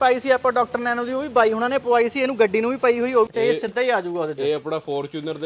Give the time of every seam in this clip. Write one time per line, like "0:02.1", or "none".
0:03.3